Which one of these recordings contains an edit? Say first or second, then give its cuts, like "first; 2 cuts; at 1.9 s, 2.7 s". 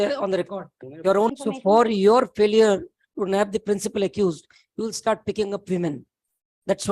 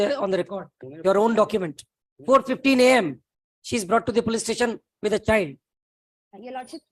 first; 1 cut; at 1.3 s